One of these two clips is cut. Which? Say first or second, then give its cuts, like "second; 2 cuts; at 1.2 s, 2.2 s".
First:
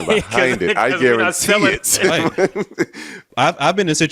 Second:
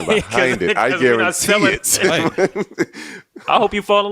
first; 1 cut; at 3.2 s